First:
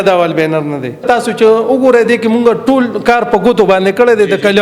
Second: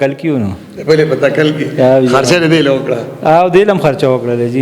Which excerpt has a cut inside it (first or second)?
first